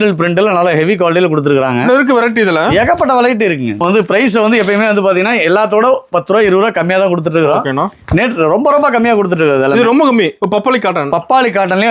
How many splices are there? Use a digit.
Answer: 2